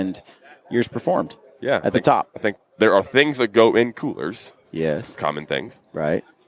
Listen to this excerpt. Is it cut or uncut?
cut